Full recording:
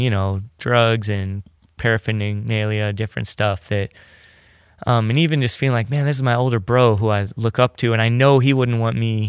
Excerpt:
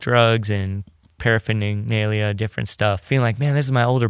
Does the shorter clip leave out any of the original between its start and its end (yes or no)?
yes